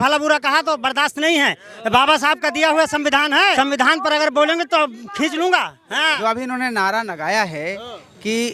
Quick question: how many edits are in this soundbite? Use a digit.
2